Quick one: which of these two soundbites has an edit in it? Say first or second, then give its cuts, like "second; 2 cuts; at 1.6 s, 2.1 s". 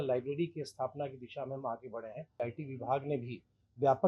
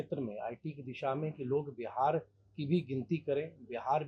first; 1 cut; at 2.4 s